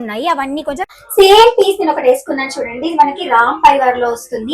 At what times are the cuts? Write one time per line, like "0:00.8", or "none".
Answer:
0:00.9